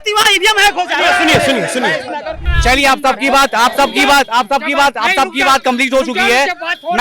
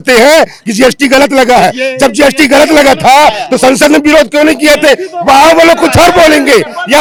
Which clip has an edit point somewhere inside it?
first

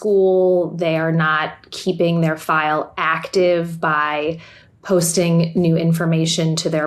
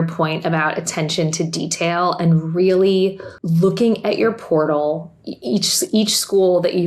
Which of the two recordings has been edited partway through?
second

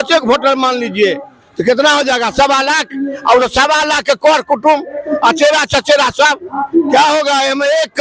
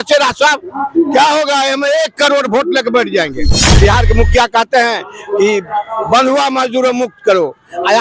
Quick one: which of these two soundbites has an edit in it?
second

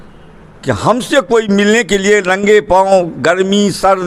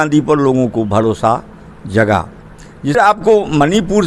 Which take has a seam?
second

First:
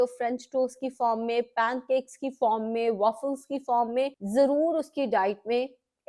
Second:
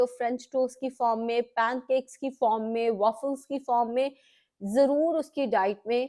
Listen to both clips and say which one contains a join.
first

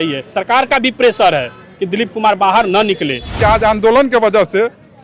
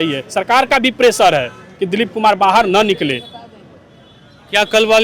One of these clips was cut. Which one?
first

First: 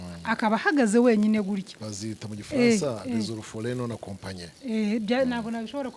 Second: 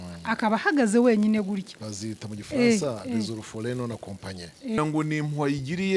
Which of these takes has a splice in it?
second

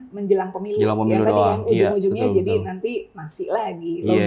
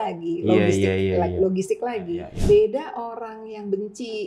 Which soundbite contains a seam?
second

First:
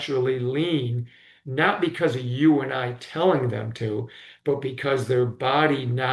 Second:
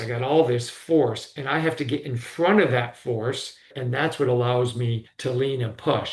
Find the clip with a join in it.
second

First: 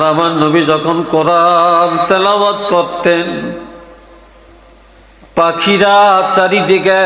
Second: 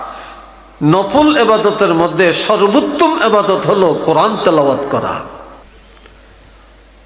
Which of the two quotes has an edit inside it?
second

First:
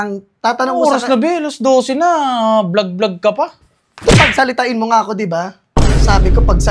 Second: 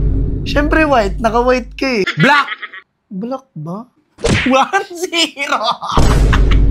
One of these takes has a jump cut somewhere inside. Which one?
second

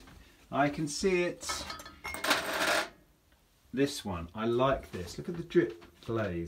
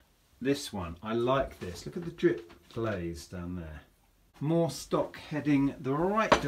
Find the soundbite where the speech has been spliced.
second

